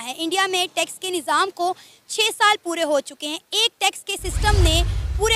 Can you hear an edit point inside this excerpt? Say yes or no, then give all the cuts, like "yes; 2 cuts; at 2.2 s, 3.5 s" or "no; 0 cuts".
no; 0 cuts